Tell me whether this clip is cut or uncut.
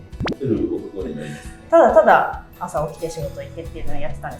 cut